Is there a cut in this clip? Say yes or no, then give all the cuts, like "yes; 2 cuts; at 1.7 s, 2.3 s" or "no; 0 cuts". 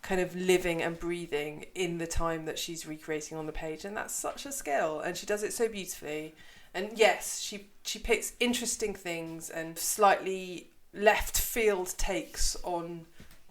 yes; 2 cuts; at 9.9 s, 10.9 s